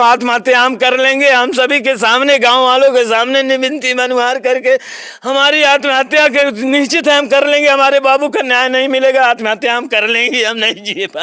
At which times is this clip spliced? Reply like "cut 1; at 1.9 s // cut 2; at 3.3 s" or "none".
none